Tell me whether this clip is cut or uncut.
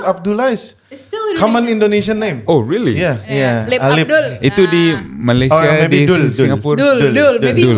cut